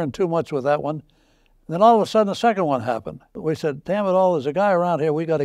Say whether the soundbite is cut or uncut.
uncut